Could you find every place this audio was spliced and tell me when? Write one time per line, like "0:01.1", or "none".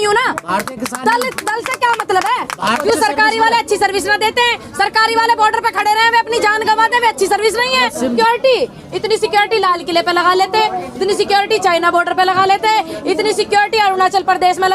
0:02.8
0:08.1